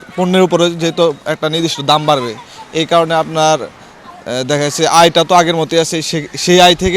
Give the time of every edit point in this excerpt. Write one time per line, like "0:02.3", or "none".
none